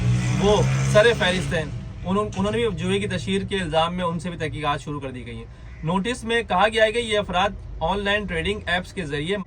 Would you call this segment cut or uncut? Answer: uncut